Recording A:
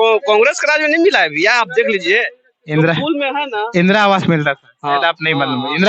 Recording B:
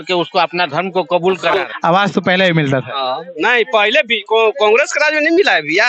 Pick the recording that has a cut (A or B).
B